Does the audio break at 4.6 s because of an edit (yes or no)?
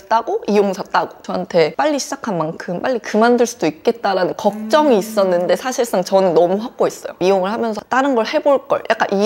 no